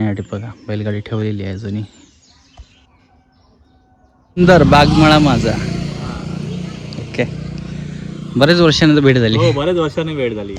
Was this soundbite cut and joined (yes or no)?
yes